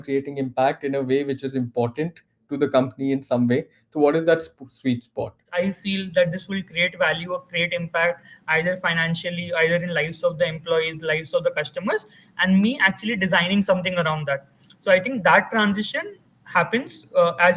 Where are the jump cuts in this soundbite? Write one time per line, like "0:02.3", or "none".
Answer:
0:05.4